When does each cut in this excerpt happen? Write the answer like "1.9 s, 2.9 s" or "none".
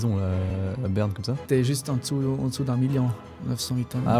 1.4 s